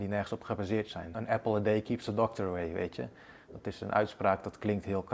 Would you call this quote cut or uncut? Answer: cut